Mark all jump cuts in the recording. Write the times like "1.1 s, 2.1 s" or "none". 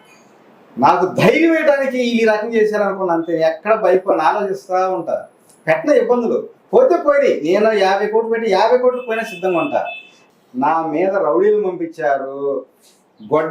10.2 s